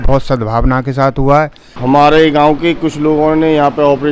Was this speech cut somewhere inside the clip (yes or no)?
yes